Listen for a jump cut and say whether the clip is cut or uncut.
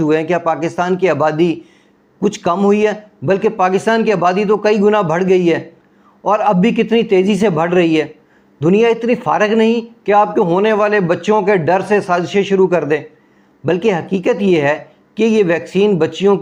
uncut